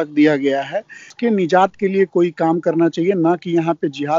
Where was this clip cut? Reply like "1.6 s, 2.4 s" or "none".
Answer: 1.0 s